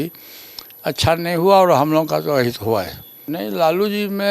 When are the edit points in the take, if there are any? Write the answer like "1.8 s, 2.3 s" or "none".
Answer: 3.2 s